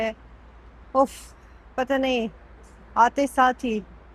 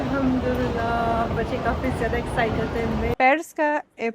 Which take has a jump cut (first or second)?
second